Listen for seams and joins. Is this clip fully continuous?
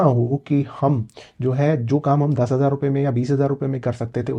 yes; 0 cuts

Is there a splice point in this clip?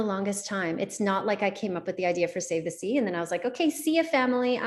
no; 0 cuts

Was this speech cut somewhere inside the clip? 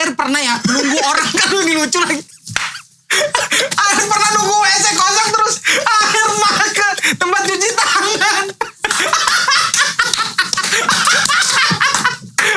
no; 0 cuts

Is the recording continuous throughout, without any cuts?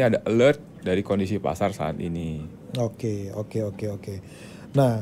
yes; 0 cuts

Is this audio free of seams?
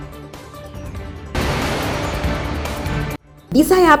yes; 0 cuts

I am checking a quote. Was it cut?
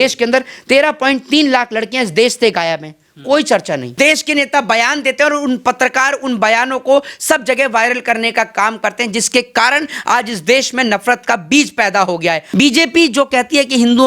yes; 2 cuts; at 3.9 s, 12.4 s

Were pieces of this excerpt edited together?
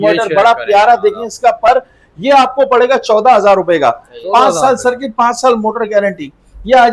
no; 0 cuts

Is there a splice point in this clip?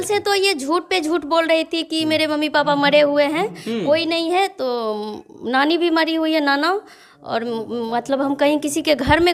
no; 0 cuts

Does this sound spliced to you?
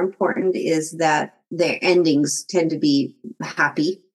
yes; 1 cut; at 1.5 s

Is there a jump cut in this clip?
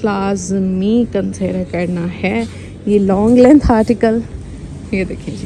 no; 0 cuts

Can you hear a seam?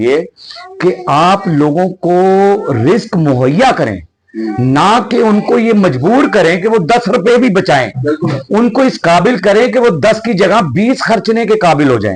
no; 0 cuts

